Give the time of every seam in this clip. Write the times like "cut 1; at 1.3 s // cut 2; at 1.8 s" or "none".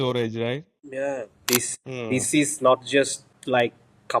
cut 1; at 1.4 s